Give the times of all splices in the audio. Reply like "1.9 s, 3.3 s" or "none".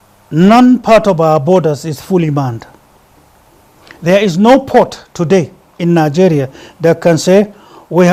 none

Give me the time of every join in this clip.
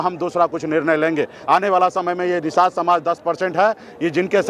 1.4 s

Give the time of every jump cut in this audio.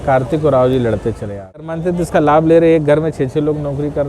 1.7 s

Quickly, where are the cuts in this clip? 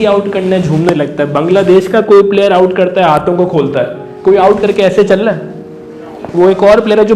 none

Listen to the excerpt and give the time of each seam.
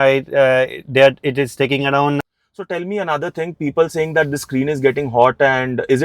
2.2 s

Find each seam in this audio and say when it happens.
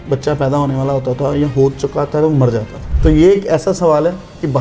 2.9 s

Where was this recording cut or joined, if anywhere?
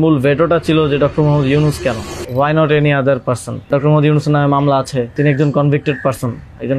2.1 s, 3.7 s, 5.1 s

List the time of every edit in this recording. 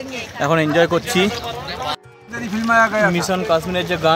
2.0 s

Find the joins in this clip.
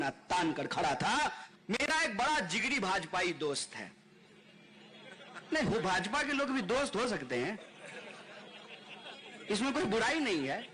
1.4 s

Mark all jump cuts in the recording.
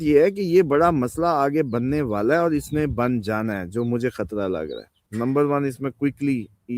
4.9 s

